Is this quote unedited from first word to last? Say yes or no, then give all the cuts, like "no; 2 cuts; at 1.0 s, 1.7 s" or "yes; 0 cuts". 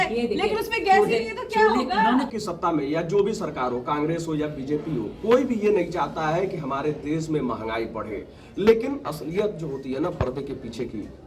no; 1 cut; at 2.3 s